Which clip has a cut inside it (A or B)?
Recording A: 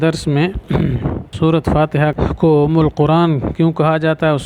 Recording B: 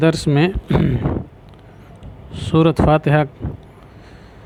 A